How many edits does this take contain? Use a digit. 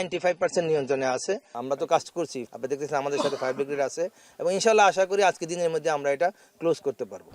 2